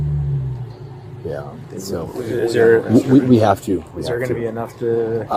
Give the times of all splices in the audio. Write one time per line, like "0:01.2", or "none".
none